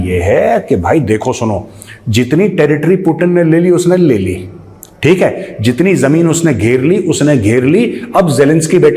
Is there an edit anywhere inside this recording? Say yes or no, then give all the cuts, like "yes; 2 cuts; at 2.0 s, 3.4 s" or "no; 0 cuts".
no; 0 cuts